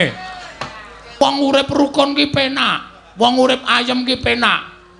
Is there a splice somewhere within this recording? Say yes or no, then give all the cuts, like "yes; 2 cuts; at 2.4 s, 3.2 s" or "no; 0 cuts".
yes; 1 cut; at 1.2 s